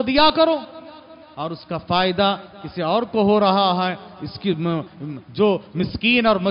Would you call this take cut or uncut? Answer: uncut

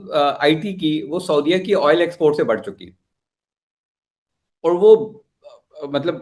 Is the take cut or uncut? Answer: uncut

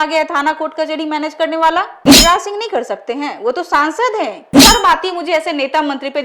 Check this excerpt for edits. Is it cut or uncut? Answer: cut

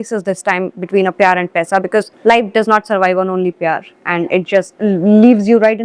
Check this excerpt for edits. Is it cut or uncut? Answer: cut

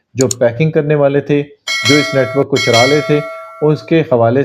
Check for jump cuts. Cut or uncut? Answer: uncut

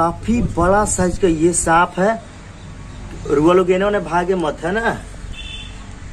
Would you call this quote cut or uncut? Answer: uncut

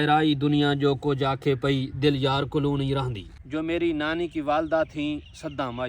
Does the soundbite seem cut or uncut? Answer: cut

